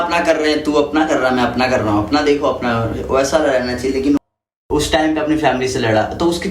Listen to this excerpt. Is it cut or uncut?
cut